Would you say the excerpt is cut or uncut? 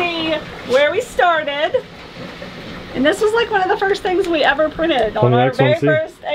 uncut